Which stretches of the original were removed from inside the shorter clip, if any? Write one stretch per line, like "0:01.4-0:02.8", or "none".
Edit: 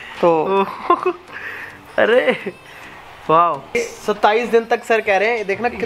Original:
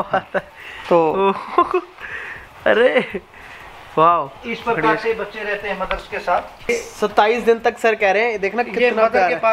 0:04.3-0:06.6